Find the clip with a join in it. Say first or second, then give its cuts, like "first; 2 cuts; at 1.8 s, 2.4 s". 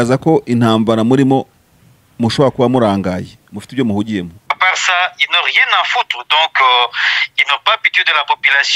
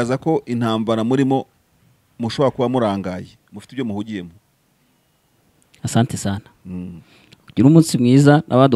first; 1 cut; at 4.4 s